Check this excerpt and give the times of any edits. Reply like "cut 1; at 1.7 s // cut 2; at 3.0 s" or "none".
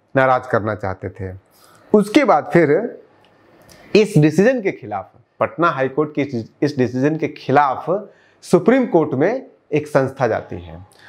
none

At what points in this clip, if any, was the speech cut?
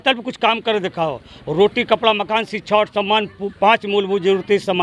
none

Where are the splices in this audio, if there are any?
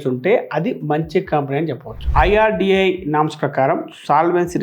cut 1; at 2.0 s

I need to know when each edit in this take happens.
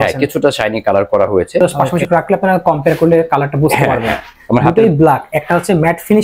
cut 1; at 1.6 s

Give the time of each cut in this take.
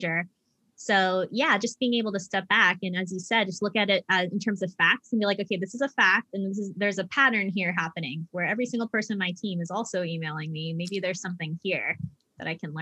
none

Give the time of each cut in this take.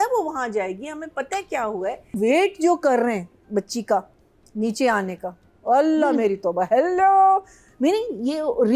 cut 1; at 2.1 s

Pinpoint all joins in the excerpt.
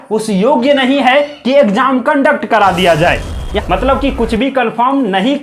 cut 1; at 3.5 s

